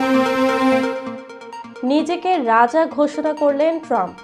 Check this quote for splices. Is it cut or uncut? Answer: cut